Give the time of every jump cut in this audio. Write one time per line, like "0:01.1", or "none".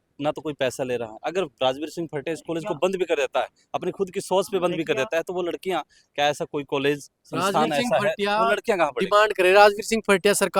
none